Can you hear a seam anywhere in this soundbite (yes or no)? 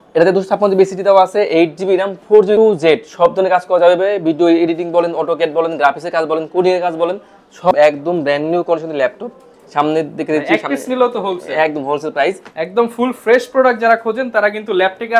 yes